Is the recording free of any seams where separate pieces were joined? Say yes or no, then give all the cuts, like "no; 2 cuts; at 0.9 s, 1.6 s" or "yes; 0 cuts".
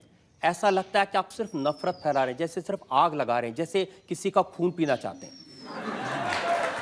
yes; 0 cuts